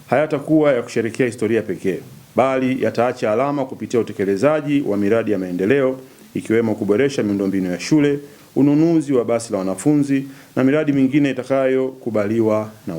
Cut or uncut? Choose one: uncut